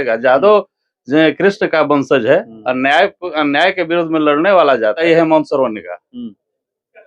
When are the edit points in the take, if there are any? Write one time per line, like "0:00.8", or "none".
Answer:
0:05.0